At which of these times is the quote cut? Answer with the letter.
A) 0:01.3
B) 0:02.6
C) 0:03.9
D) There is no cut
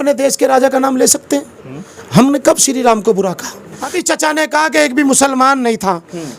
C